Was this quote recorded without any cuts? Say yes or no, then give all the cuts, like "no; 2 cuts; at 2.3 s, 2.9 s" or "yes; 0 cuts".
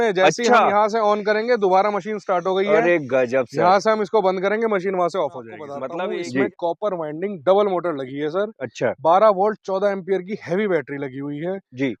no; 1 cut; at 5.8 s